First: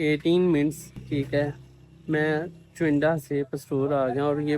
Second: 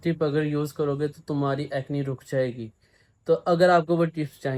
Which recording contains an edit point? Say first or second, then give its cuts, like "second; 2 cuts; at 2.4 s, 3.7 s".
first; 1 cut; at 0.9 s